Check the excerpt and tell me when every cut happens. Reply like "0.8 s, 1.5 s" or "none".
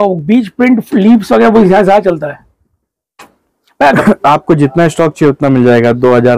4.0 s